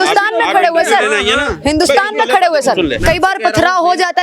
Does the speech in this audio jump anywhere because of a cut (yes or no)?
yes